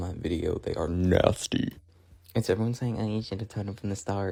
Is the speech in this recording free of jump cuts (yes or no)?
yes